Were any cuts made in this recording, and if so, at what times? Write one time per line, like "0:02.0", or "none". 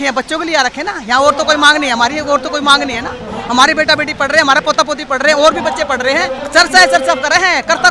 0:06.4